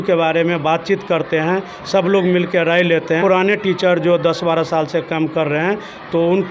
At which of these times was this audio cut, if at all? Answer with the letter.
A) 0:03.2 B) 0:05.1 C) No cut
A